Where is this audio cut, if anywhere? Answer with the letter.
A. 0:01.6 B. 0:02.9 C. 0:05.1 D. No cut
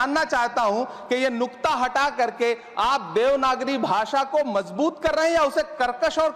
D